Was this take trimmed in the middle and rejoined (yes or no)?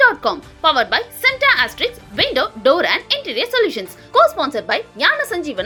no